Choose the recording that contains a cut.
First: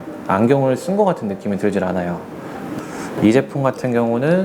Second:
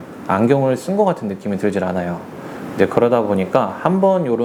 first; 1 cut; at 2.7 s

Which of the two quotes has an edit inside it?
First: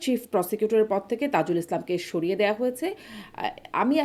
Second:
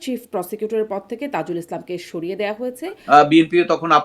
second; 1 cut; at 2.9 s

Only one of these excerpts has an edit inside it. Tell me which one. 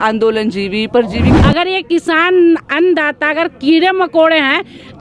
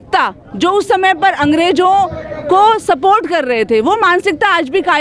first; 1 cut; at 1.3 s

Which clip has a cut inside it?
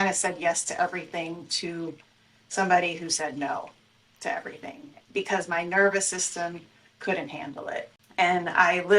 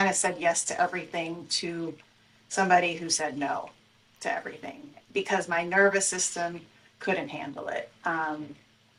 first; 1 cut; at 7.9 s

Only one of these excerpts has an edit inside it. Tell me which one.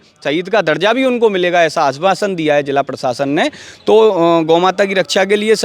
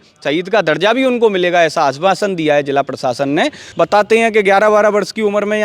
second; 1 cut; at 3.6 s

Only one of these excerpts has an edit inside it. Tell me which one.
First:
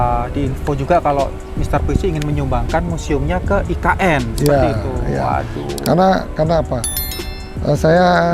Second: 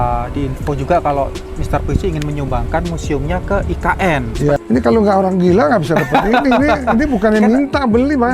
second; 1 cut; at 4.6 s

